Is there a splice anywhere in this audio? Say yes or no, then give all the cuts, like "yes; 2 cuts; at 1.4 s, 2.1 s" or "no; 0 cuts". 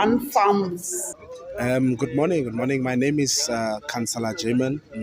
yes; 1 cut; at 1.5 s